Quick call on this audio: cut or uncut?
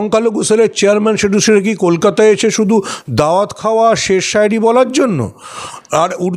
uncut